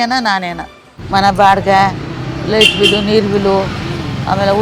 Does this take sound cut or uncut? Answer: cut